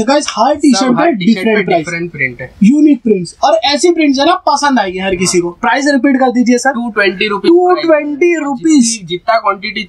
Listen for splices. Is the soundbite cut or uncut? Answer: uncut